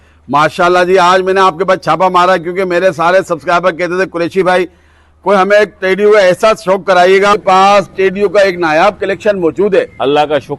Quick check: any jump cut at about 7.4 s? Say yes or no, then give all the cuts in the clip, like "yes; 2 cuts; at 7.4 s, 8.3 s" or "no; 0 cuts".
yes; 1 cut; at 7.4 s